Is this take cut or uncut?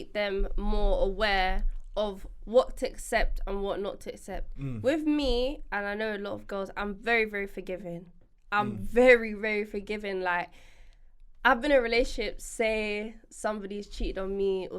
uncut